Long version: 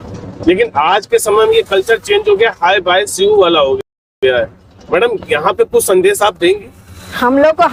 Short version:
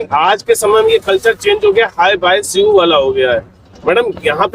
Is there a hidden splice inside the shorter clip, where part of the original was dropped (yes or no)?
yes